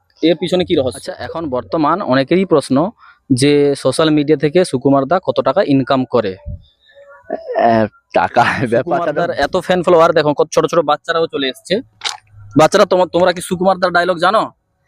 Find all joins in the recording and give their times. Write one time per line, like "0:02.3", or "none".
0:01.3
0:09.1

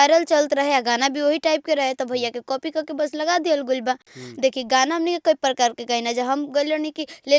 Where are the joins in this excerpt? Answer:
none

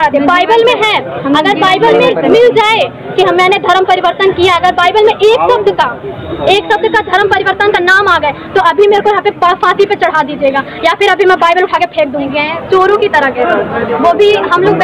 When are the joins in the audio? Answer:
0:12.3

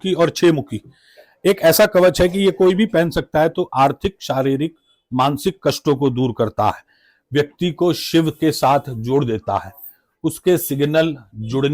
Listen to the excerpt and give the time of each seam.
none

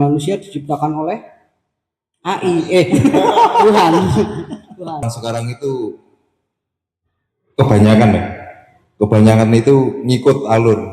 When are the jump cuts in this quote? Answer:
0:05.0

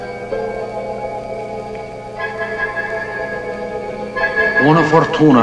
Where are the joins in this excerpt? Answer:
none

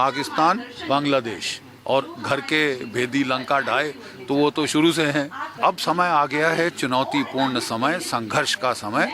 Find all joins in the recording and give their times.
0:05.5

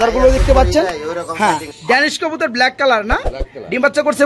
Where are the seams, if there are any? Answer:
0:01.7

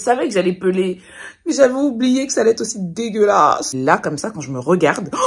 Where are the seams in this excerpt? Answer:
0:03.7

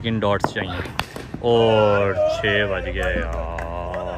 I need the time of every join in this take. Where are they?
none

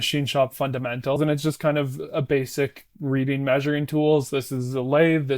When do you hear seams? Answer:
0:01.2

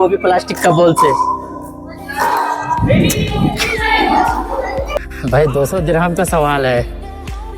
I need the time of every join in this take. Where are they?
0:05.0

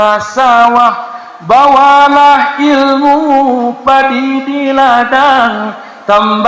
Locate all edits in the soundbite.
none

